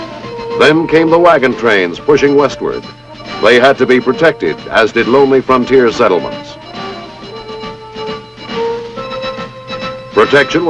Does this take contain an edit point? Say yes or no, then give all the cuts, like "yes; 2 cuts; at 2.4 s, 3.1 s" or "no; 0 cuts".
no; 0 cuts